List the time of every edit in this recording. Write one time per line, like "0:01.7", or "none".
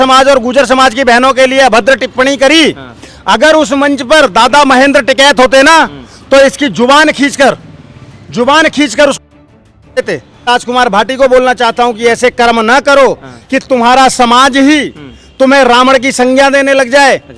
0:10.5